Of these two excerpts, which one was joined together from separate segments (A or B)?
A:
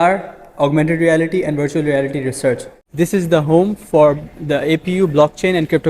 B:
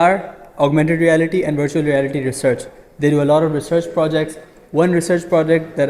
A